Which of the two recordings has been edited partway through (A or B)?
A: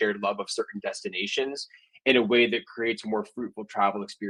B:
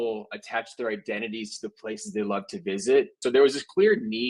B